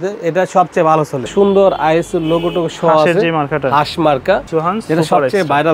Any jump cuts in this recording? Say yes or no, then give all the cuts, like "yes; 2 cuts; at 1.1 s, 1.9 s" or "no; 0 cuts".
yes; 2 cuts; at 1.3 s, 4.4 s